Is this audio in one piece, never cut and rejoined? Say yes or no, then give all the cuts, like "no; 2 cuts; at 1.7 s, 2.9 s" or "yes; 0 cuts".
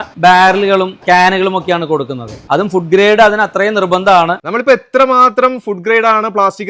no; 1 cut; at 4.4 s